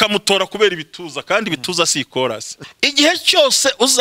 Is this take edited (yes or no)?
yes